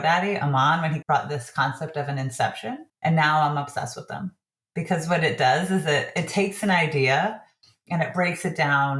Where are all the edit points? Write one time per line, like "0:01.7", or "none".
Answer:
0:01.0
0:02.9